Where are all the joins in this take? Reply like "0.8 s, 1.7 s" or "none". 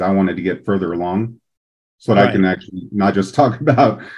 none